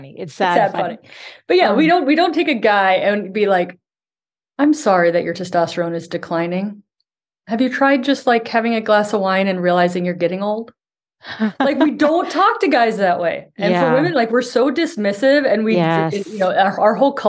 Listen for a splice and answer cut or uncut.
uncut